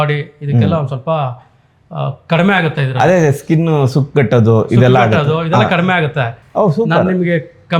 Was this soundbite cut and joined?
no; 0 cuts

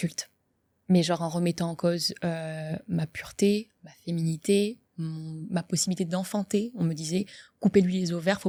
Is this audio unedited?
yes; 0 cuts

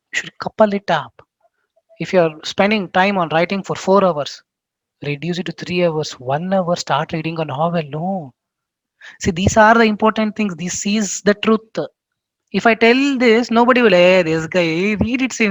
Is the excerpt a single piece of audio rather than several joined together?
yes; 0 cuts

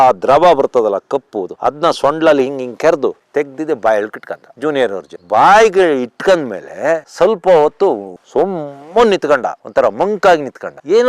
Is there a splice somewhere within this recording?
no; 0 cuts

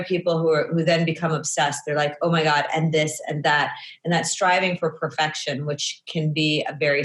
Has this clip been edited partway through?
no; 0 cuts

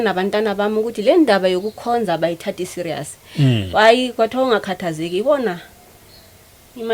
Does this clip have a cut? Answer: no; 0 cuts

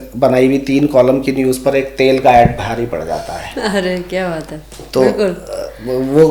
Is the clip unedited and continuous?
yes; 0 cuts

